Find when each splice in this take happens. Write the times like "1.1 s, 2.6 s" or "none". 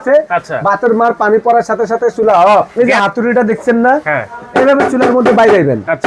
2.7 s